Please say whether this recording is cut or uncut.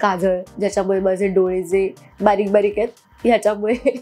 uncut